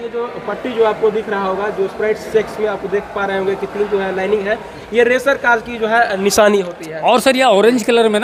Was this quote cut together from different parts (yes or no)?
no